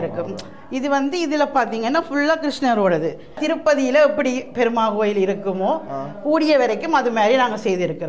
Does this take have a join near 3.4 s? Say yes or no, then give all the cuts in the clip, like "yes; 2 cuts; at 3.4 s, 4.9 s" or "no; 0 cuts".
yes; 1 cut; at 3.4 s